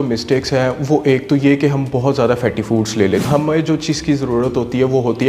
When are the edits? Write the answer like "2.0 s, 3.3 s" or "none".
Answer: 3.2 s